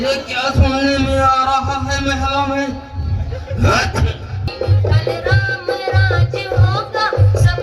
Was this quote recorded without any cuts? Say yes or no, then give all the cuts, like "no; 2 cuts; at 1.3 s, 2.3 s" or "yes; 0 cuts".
no; 1 cut; at 4.5 s